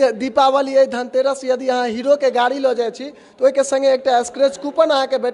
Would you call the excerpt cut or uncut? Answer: uncut